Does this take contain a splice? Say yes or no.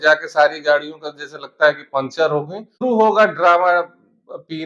yes